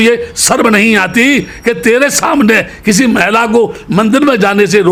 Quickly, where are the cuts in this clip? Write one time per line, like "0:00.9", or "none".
none